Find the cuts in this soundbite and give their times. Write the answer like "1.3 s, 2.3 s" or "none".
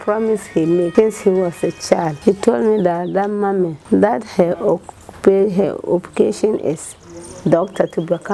0.9 s, 2.1 s, 3.8 s